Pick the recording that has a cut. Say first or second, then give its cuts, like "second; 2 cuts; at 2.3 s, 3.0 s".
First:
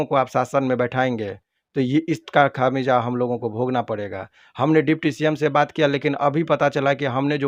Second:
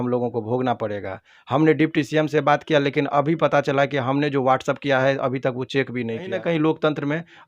second; 1 cut; at 6.4 s